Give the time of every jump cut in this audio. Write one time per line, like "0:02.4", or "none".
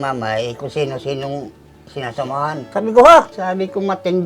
0:02.7
0:03.3